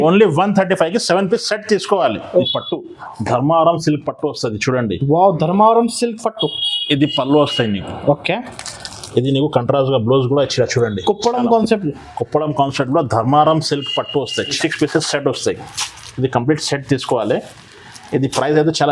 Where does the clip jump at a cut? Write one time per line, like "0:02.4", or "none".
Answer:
0:02.3
0:14.5

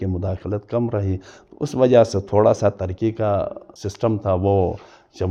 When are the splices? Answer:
none

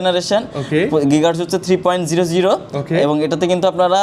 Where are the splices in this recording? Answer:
none

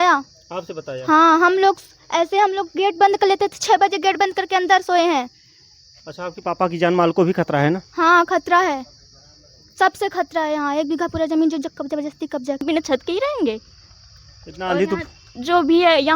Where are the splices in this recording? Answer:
0:12.6

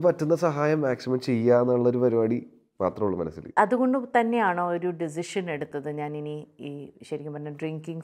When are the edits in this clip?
0:03.5

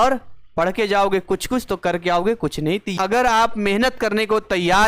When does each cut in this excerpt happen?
0:03.0

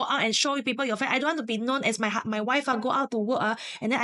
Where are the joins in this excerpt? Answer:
none

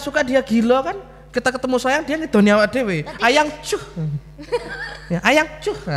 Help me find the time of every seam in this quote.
none

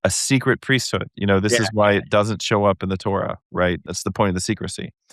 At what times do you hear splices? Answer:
0:03.8

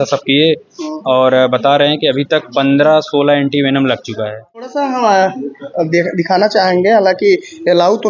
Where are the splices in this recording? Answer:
0:04.7

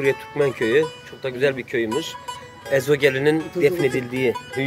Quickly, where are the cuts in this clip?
0:03.5

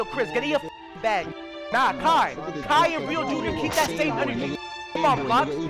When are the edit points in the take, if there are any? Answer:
0:01.4

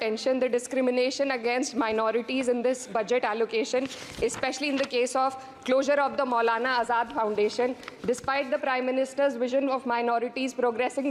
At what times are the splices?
none

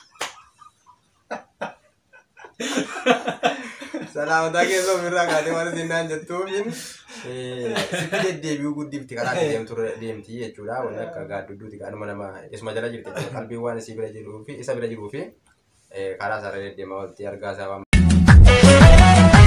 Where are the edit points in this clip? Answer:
0:17.9

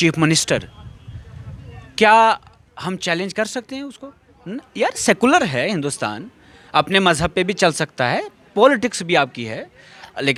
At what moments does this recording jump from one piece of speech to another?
none

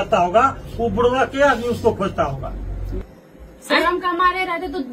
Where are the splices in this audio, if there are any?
0:02.9

